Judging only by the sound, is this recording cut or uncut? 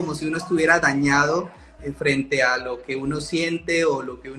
uncut